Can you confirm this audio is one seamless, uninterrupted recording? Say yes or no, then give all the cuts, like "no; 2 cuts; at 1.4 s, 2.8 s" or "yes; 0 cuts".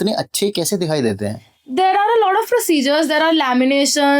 yes; 0 cuts